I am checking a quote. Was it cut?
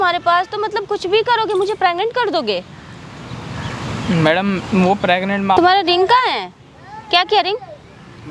no; 0 cuts

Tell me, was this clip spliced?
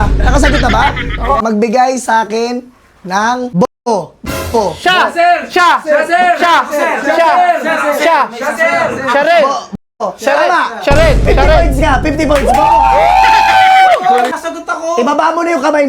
yes; 3 cuts; at 1.4 s, 3.5 s, 14.4 s

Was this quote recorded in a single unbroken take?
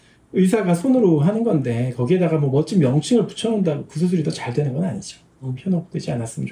no; 1 cut; at 5.5 s

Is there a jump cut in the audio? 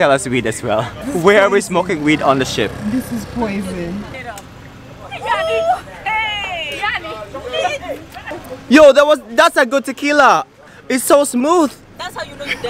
yes; 2 cuts; at 1.0 s, 4.2 s

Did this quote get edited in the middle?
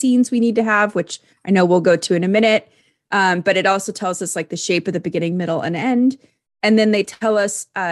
no; 0 cuts

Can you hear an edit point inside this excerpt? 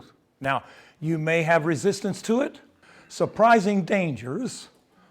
yes; 1 cut; at 2.7 s

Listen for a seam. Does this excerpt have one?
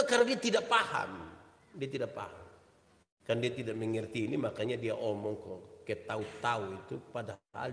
no; 0 cuts

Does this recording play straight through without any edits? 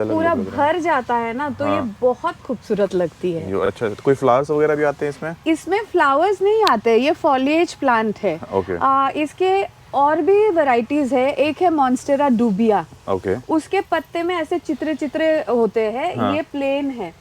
yes; 0 cuts

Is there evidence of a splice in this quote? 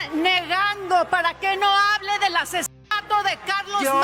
no; 0 cuts

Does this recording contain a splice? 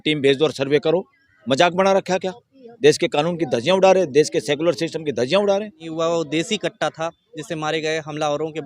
yes; 2 cuts; at 1.3 s, 5.8 s

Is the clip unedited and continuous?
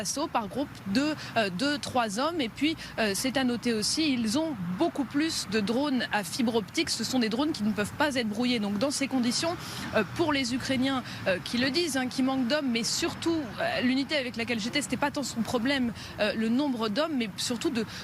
yes; 0 cuts

